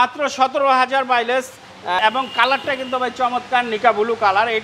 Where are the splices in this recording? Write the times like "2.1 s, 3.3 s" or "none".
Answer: 2.0 s